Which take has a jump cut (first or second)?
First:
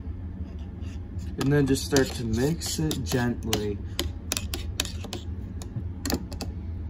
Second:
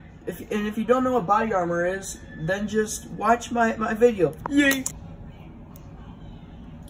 second